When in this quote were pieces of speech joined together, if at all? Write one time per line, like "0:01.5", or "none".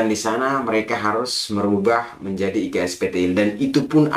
none